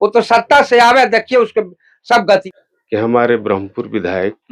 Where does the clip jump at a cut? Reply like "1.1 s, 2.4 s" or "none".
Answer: 2.5 s